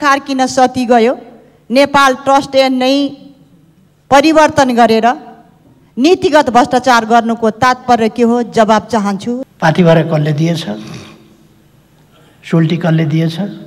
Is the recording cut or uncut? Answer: cut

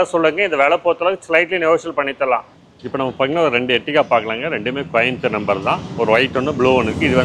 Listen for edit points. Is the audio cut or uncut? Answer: cut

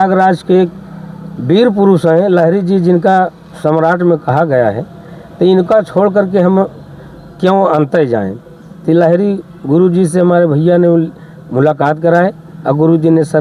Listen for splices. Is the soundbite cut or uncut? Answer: uncut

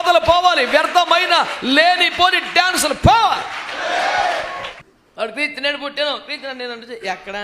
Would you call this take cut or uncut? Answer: uncut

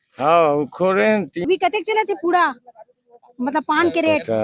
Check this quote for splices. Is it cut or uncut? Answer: cut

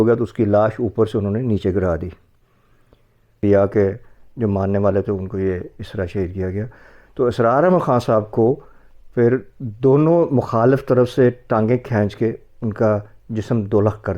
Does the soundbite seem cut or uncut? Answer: cut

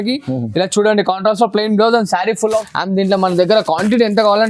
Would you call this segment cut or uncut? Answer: cut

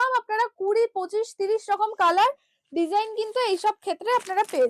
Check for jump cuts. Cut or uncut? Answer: uncut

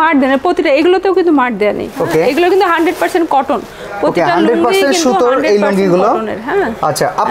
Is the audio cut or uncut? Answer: cut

